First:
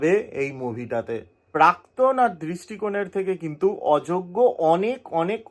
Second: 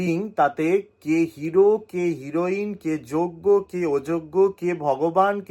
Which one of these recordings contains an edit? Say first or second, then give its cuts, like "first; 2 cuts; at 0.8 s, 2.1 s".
first; 1 cut; at 1.5 s